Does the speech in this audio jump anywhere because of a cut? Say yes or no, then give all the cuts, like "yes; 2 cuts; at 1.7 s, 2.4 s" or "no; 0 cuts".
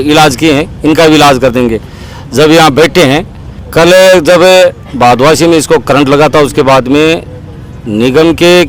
no; 0 cuts